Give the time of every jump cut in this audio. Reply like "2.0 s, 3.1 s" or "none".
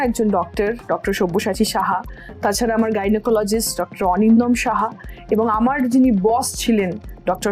none